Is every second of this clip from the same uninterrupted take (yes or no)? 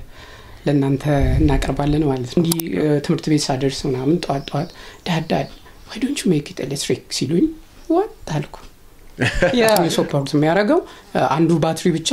no